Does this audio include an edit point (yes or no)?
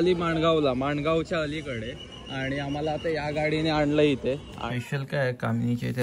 yes